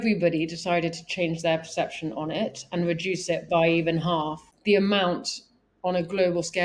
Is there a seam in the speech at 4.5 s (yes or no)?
yes